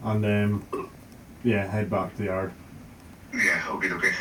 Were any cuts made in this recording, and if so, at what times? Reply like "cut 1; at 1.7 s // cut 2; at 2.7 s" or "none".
none